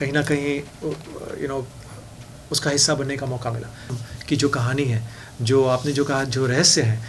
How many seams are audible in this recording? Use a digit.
1